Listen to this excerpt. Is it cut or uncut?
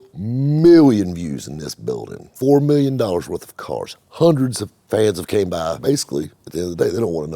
cut